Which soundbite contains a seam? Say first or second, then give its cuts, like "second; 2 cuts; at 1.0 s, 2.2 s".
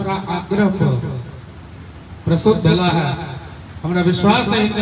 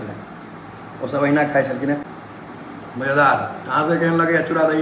second; 1 cut; at 2.1 s